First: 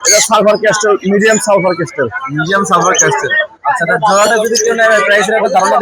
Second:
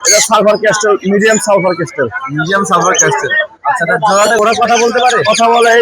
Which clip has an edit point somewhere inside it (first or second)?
second